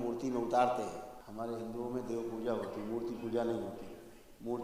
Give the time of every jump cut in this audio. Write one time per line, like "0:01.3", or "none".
0:01.2